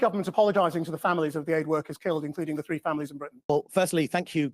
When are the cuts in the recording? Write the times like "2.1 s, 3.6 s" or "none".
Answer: none